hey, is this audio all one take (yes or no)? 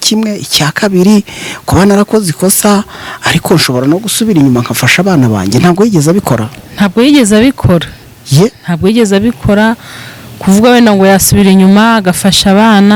yes